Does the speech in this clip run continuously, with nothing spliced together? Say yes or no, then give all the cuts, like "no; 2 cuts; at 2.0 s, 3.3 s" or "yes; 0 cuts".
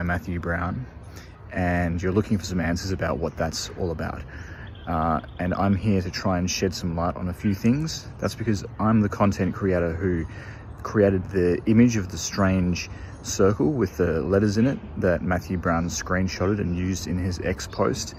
yes; 0 cuts